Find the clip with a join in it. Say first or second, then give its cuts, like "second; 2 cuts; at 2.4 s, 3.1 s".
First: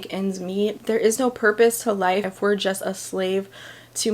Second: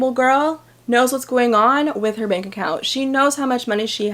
first; 2 cuts; at 0.8 s, 2.3 s